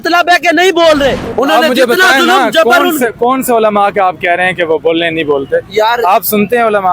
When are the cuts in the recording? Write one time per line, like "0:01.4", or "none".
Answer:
0:01.2